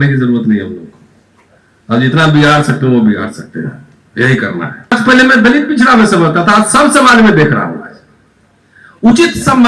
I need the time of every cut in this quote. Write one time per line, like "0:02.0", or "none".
0:04.9